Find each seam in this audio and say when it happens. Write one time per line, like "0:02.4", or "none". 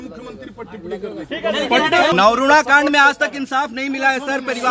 0:02.1